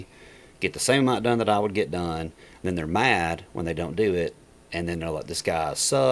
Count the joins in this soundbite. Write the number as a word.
zero